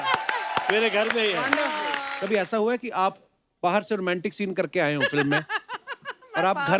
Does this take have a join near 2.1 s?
yes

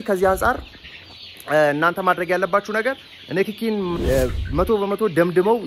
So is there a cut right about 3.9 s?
yes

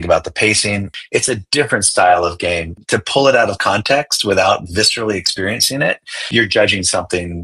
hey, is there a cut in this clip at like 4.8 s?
no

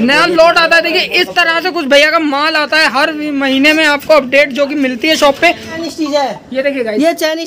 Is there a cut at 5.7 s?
yes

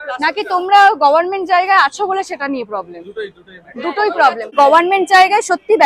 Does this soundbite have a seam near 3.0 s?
no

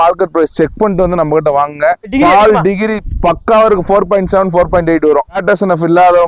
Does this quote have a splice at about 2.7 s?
no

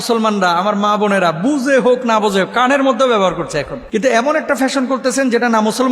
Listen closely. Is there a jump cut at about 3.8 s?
yes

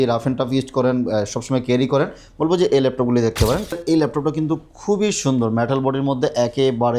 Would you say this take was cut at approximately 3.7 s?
yes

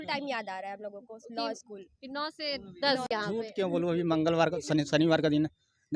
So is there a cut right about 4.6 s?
no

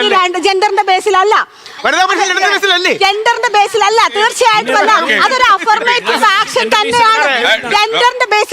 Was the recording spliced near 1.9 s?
yes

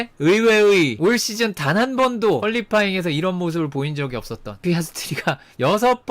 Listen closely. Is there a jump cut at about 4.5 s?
yes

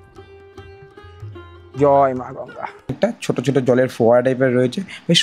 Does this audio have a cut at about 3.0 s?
yes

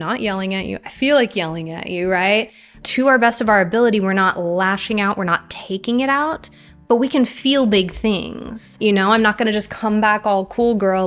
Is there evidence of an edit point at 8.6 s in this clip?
yes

